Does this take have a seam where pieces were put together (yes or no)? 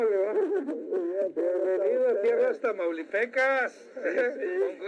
no